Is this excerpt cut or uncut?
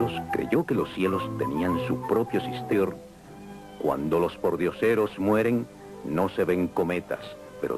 uncut